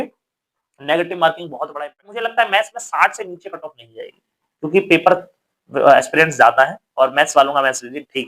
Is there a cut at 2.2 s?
yes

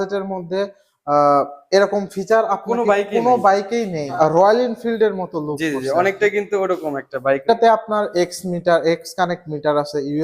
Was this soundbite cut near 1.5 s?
no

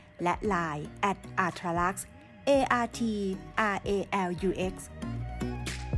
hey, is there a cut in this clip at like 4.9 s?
yes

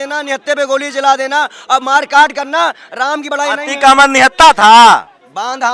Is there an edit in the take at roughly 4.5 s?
no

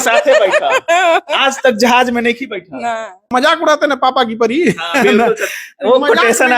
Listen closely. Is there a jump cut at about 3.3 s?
yes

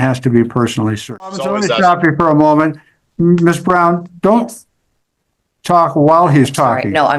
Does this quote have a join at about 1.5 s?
yes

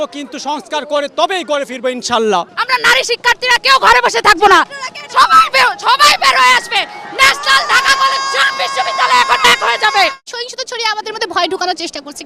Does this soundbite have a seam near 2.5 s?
yes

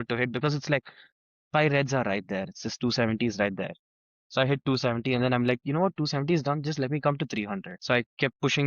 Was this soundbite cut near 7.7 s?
yes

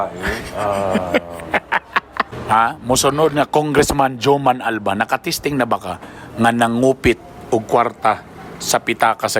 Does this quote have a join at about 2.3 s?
yes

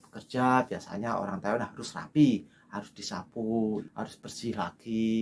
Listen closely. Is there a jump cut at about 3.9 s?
yes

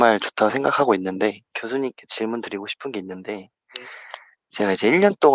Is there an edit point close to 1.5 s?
yes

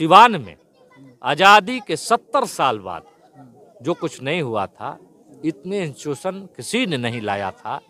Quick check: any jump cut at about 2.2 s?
no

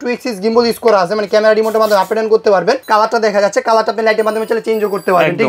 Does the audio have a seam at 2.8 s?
yes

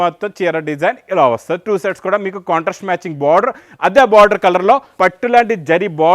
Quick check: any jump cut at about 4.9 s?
yes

